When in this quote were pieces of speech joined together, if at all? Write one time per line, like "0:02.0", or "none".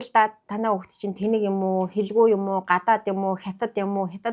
none

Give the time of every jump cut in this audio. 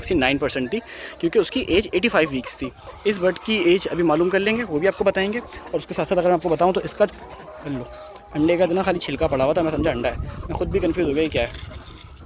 none

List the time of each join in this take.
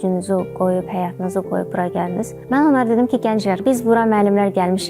0:02.4
0:03.6

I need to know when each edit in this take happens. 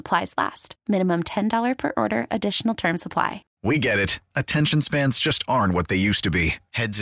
0:03.5

